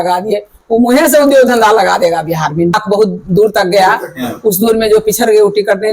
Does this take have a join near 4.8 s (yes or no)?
no